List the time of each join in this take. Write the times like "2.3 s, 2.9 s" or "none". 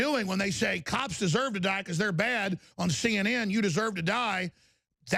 none